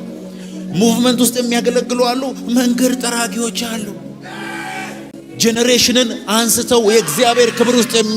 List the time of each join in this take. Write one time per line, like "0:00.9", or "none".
0:05.1